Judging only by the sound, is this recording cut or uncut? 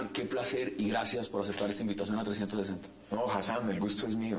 cut